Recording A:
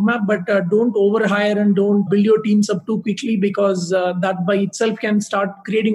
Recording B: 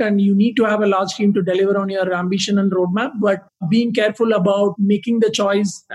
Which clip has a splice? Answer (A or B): B